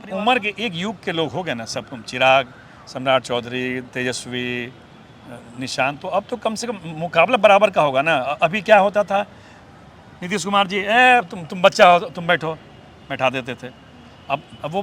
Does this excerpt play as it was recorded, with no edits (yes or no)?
yes